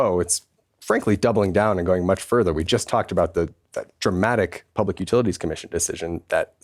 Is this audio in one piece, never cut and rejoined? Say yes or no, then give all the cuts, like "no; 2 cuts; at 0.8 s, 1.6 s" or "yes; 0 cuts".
yes; 0 cuts